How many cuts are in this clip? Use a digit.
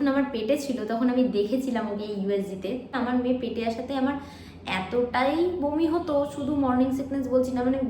1